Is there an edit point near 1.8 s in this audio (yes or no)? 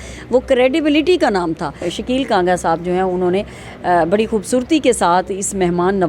yes